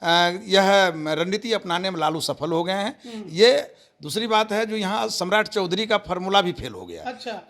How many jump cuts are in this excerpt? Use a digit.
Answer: 0